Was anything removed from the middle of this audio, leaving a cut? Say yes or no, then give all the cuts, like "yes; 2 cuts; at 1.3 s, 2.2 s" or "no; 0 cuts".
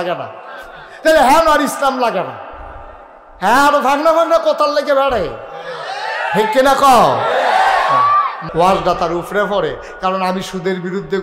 yes; 1 cut; at 8.4 s